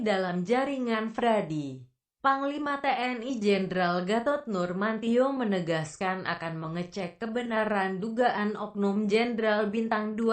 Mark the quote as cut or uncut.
uncut